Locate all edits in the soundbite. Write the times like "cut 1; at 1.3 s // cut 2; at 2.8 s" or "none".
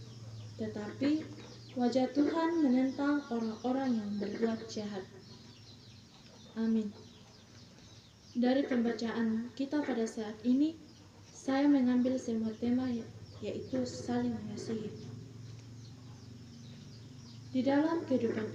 none